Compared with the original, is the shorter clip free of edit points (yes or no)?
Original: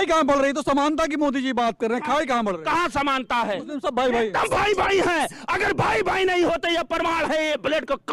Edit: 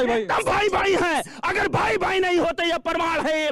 yes